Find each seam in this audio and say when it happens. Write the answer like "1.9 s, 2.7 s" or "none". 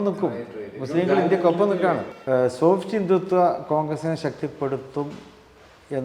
2.1 s